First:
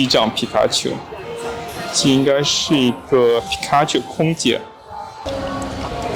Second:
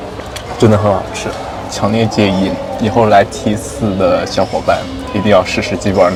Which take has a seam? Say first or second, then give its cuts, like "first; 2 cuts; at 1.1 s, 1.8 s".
first; 1 cut; at 5.2 s